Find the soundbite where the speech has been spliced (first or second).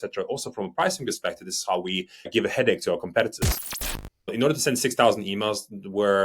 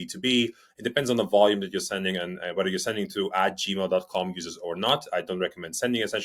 first